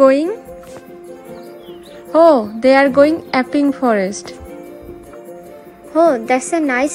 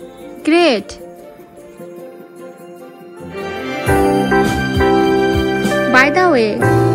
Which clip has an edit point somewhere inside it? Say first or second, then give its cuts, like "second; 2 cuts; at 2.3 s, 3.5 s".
first; 2 cuts; at 1.4 s, 4.7 s